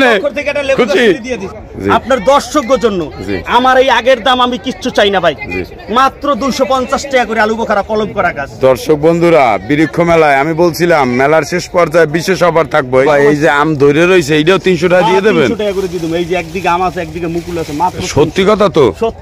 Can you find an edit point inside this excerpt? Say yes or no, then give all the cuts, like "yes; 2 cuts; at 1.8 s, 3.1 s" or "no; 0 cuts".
yes; 2 cuts; at 1.4 s, 13.0 s